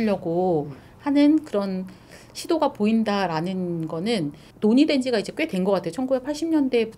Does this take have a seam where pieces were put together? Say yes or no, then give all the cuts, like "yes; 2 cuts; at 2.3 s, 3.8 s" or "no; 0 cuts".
yes; 1 cut; at 4.4 s